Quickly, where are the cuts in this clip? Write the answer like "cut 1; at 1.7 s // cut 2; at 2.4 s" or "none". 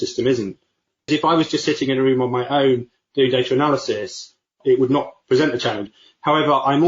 cut 1; at 1.0 s // cut 2; at 5.9 s

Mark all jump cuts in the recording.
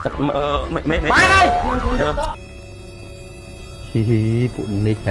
cut 1; at 2.4 s

